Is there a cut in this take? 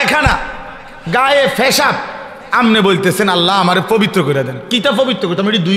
no; 0 cuts

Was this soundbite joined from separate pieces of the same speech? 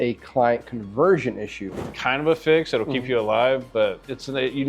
yes; 1 cut; at 1.9 s

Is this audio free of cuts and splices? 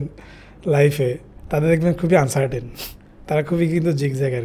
yes; 0 cuts

